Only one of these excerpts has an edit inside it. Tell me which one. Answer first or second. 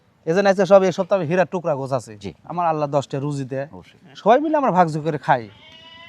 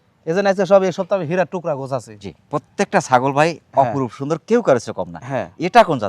first